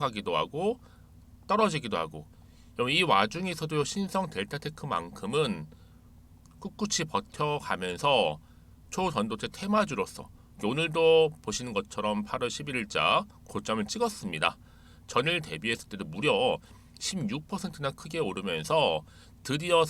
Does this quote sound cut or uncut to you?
uncut